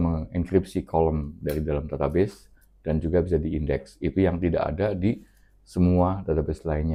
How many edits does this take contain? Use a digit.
0